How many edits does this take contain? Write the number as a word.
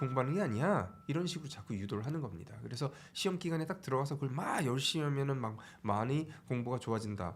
one